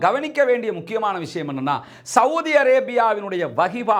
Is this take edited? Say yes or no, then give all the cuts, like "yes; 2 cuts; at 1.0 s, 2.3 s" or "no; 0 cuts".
no; 0 cuts